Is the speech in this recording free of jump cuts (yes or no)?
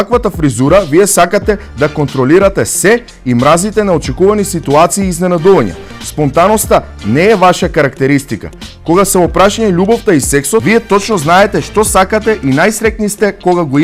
yes